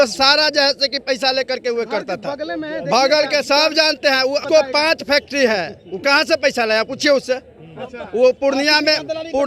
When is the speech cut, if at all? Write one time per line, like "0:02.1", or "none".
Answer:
0:04.4